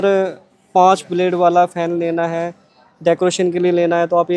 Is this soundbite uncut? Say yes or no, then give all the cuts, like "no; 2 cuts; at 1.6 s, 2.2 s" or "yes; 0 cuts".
yes; 0 cuts